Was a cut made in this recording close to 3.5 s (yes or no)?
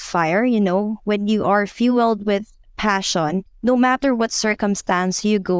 yes